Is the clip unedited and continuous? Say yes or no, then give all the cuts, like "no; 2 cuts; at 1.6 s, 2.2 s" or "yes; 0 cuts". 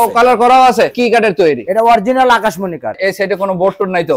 no; 2 cuts; at 0.9 s, 3.0 s